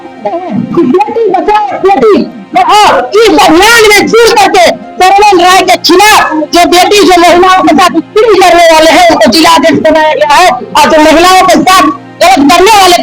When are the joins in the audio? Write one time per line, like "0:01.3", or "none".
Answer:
none